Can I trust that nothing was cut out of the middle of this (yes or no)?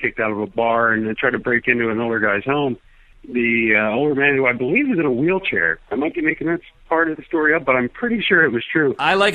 yes